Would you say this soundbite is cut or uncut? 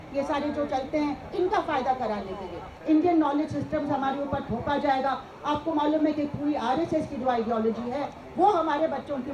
cut